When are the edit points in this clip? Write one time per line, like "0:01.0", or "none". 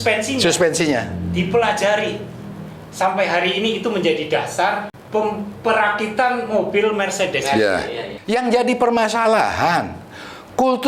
0:05.0
0:08.1